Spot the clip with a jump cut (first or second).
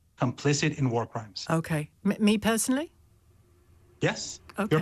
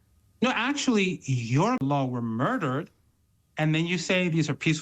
second